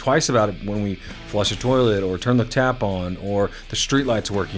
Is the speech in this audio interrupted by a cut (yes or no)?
no